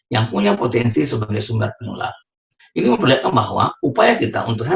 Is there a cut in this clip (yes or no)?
no